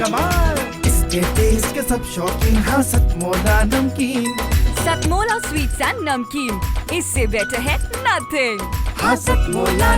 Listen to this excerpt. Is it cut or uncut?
uncut